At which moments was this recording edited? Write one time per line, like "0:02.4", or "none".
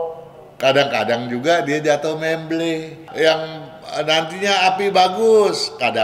0:03.0